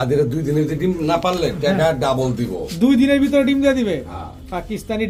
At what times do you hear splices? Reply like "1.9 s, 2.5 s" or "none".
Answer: none